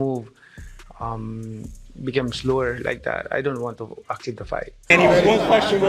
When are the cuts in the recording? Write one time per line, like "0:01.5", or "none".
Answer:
0:04.9